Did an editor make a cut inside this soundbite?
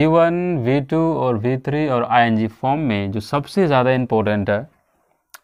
no; 0 cuts

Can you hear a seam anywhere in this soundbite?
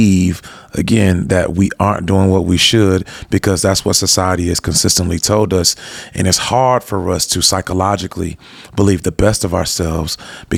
no; 0 cuts

